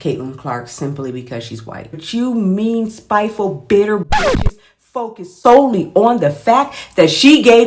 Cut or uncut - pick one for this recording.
cut